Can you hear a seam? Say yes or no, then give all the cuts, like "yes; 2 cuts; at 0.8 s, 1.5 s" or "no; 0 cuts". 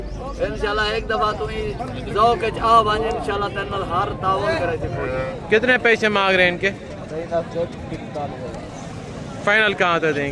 yes; 1 cut; at 5.2 s